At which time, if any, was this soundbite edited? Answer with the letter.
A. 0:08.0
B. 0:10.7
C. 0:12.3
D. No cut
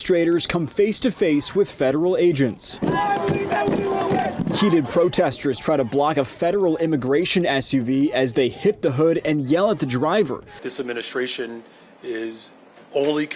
B